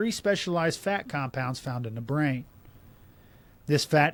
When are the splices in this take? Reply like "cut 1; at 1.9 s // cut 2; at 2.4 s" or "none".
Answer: none

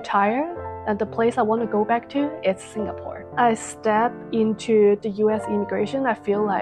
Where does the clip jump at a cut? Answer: cut 1; at 3.3 s // cut 2; at 5.0 s

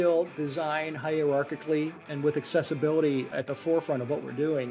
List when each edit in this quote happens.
cut 1; at 2.0 s // cut 2; at 3.3 s

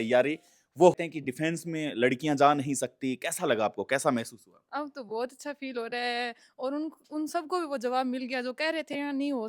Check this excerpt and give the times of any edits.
cut 1; at 0.9 s

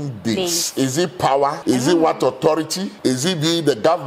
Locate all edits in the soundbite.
cut 1; at 1.6 s // cut 2; at 2.9 s

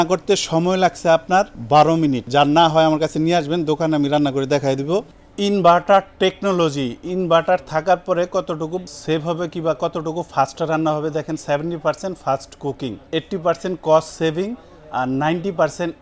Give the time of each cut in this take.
cut 1; at 2.0 s // cut 2; at 5.1 s // cut 3; at 8.8 s // cut 4; at 13.0 s

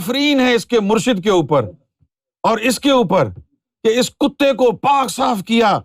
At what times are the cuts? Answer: none

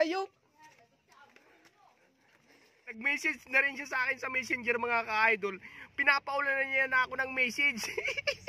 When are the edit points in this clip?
cut 1; at 2.9 s

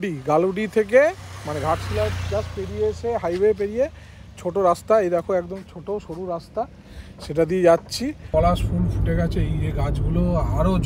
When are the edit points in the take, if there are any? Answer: cut 1; at 8.2 s

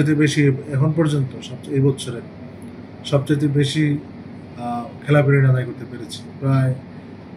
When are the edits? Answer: none

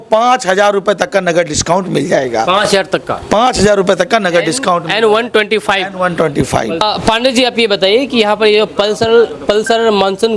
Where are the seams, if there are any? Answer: none

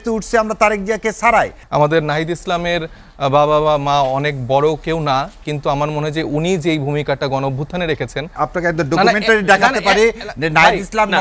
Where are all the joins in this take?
cut 1; at 1.6 s // cut 2; at 8.3 s

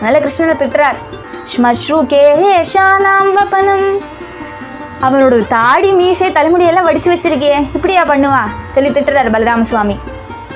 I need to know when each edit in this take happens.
cut 1; at 1.4 s

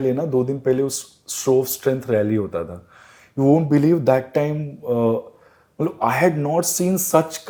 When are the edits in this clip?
none

